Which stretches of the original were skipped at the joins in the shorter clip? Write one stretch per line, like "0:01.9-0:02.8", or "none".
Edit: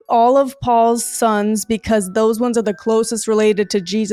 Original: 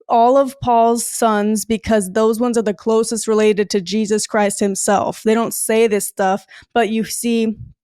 none